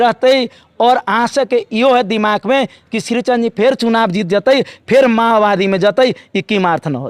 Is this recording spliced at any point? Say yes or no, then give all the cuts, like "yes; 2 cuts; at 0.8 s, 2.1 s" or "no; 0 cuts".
no; 0 cuts